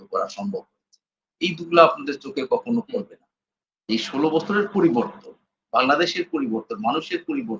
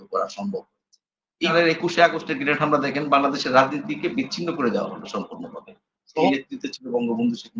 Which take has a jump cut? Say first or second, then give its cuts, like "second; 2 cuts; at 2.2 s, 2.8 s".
second; 2 cuts; at 1.5 s, 6.3 s